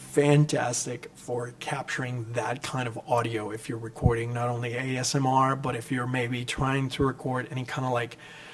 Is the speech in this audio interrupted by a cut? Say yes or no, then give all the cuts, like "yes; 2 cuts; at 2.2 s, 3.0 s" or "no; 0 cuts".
no; 0 cuts